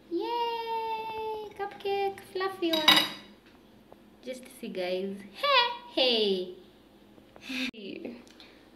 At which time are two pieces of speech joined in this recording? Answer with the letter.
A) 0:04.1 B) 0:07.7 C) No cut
B